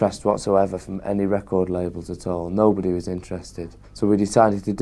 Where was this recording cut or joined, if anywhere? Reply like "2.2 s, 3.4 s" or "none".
none